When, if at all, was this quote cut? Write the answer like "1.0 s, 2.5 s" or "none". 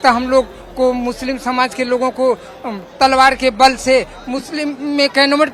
none